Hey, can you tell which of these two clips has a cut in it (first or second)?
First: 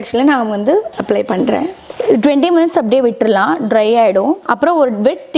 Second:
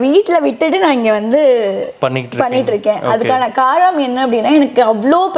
first